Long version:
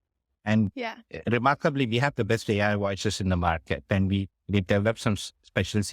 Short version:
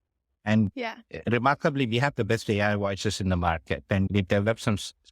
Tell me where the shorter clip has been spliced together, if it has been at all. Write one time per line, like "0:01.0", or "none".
0:04.1